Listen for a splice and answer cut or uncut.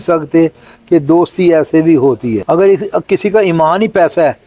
uncut